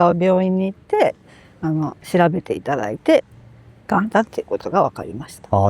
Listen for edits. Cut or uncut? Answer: uncut